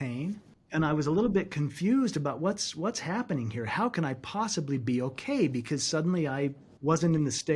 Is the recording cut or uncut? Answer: uncut